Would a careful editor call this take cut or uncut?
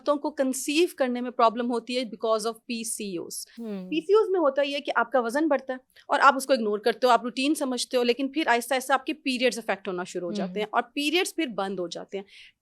uncut